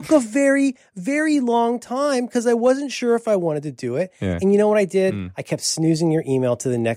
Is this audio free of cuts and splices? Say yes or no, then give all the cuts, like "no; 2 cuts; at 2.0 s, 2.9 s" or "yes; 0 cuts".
yes; 0 cuts